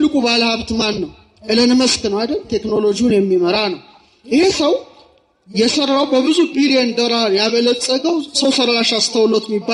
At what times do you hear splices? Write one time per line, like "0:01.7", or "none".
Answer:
none